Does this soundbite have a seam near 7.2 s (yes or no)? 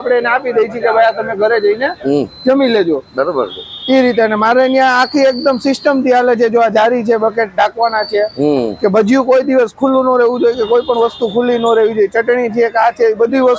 no